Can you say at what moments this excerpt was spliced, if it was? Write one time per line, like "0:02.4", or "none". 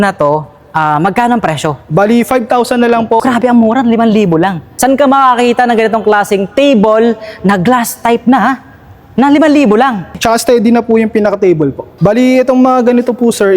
0:03.2
0:04.7
0:10.2
0:11.9